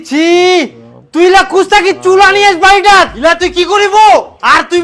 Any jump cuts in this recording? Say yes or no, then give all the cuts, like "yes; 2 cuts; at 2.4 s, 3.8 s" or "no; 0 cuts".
yes; 1 cut; at 3.1 s